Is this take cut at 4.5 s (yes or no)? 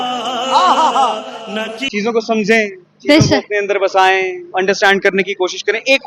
no